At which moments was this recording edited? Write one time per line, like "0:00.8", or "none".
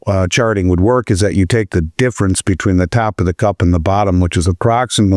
none